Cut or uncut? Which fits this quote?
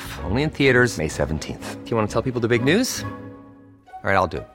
uncut